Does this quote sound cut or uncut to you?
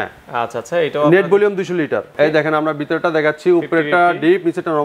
cut